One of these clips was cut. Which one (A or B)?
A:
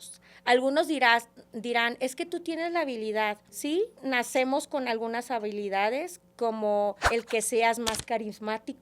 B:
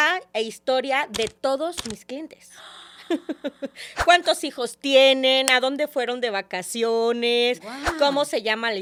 A